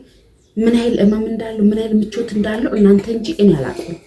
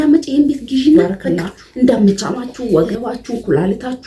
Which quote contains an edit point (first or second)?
second